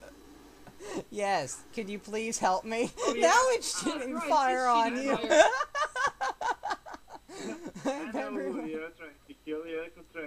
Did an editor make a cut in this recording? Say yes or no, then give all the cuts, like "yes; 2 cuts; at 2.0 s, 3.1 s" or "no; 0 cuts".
no; 0 cuts